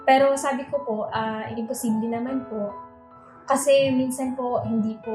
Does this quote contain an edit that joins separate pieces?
yes; 1 cut; at 2.9 s

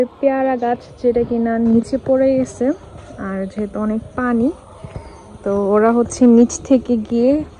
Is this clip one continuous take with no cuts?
yes; 0 cuts

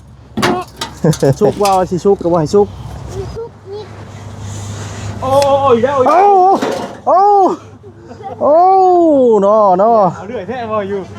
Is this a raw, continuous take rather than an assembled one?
no; 1 cut; at 1.4 s

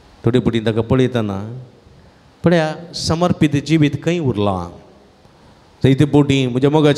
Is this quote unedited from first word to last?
yes; 0 cuts

